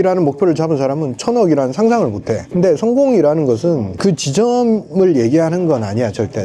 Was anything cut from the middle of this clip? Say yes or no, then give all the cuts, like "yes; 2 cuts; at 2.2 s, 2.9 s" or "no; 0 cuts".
yes; 2 cuts; at 2.4 s, 3.9 s